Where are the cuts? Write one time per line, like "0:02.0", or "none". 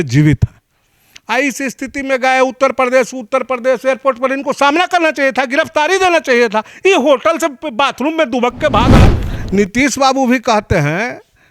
0:09.0